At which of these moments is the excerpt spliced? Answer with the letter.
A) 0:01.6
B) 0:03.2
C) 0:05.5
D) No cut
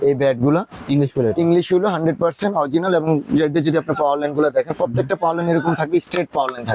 D